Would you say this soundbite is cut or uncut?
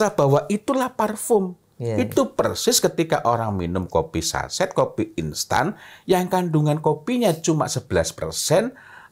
uncut